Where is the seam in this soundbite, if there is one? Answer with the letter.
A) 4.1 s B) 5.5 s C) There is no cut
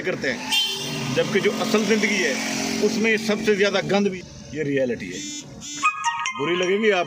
A